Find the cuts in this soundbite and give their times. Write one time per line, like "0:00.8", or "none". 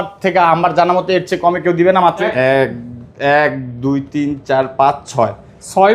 0:02.2